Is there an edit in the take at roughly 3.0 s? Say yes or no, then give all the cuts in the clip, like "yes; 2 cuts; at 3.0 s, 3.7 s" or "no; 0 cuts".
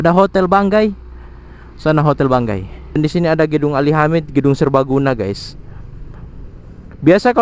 yes; 1 cut; at 3.0 s